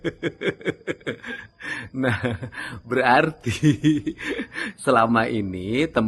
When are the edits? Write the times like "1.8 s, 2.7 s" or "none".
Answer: none